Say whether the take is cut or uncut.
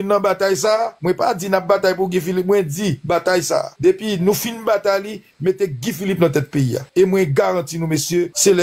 uncut